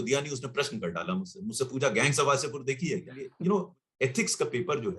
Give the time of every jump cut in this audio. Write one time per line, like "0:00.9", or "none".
0:03.2